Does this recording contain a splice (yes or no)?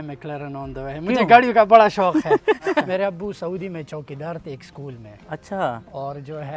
yes